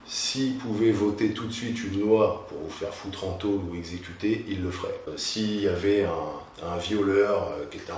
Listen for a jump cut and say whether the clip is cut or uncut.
cut